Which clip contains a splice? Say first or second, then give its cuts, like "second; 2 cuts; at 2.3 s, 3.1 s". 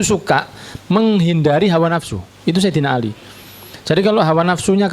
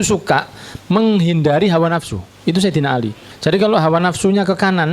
second; 1 cut; at 3.2 s